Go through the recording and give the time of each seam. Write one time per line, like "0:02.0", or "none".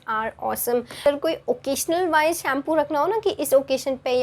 0:01.1